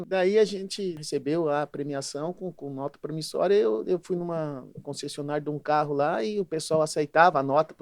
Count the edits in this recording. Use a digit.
1